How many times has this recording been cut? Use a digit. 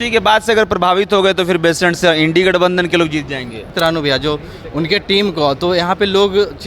1